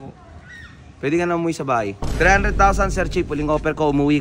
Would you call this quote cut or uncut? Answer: cut